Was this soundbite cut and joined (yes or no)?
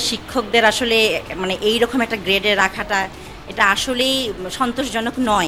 no